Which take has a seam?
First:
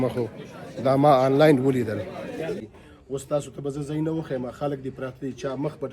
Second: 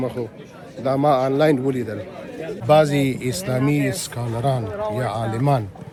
first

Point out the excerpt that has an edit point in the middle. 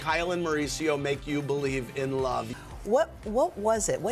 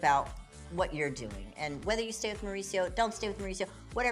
first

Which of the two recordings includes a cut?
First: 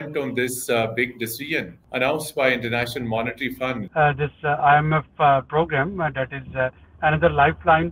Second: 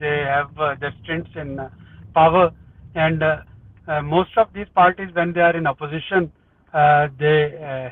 first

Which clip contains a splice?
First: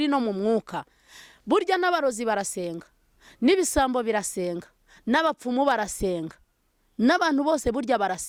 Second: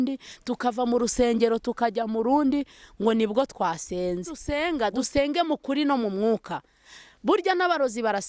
second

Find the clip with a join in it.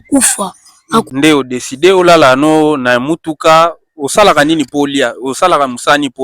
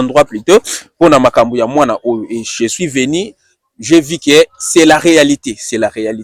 first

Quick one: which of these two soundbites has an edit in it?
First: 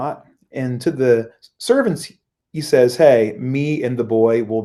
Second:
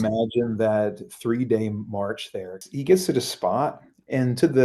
second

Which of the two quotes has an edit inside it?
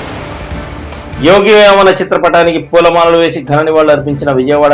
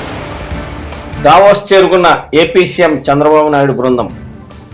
first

